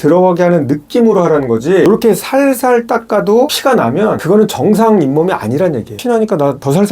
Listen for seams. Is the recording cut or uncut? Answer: cut